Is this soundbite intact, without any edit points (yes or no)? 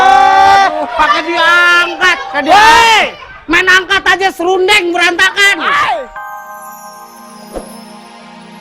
no